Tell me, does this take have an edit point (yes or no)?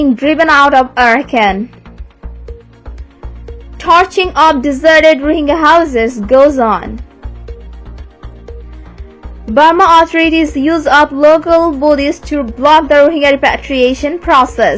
no